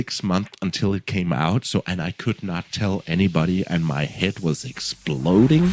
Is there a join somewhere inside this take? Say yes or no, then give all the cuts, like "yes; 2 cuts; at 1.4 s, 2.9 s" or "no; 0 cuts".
no; 0 cuts